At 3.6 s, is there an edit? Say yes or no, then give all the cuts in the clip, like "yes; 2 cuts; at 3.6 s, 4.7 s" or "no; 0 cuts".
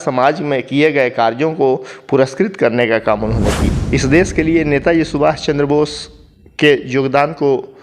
yes; 1 cut; at 3.6 s